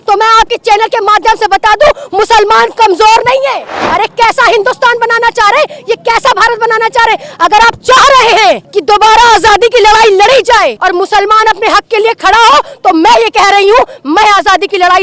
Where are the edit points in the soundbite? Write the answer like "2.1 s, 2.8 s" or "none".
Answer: 3.8 s, 8.7 s, 10.8 s